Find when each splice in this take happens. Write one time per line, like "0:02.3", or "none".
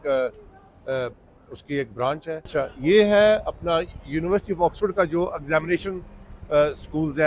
0:02.4